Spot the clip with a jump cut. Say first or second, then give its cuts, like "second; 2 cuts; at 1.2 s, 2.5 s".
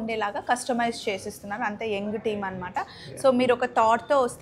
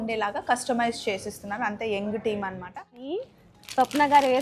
second; 1 cut; at 3.1 s